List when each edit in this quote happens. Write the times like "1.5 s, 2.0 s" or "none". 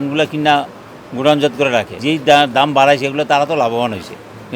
2.0 s